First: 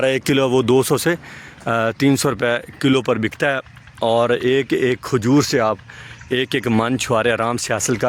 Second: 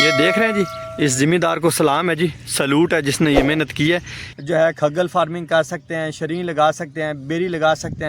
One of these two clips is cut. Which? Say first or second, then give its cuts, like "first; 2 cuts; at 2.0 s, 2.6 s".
second; 1 cut; at 4.2 s